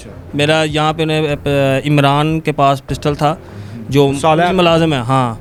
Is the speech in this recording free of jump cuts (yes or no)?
yes